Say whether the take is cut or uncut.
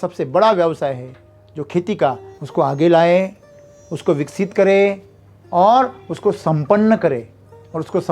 cut